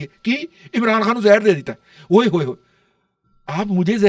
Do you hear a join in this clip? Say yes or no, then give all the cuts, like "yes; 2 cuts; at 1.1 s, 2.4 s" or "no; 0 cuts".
no; 0 cuts